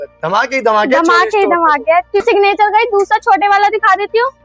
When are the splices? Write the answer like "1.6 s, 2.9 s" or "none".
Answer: 2.2 s